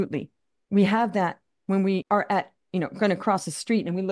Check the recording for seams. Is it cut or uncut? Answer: cut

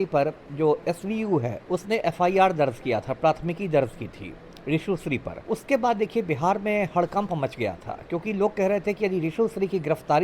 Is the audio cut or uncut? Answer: cut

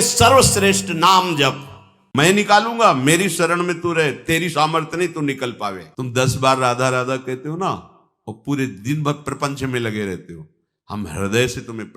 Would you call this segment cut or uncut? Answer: cut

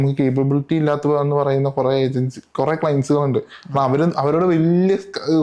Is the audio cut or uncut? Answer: uncut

